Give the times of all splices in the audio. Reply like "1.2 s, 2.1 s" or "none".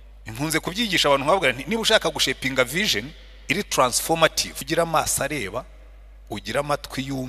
4.5 s